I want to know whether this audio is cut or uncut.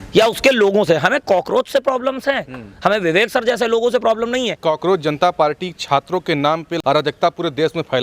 cut